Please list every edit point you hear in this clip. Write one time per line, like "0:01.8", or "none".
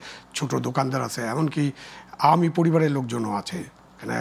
none